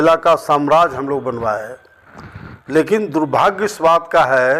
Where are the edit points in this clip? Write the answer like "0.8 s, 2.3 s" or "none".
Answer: none